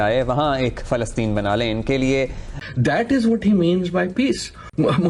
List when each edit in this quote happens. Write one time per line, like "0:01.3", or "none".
0:02.5